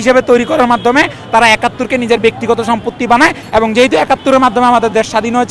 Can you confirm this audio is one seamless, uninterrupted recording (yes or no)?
yes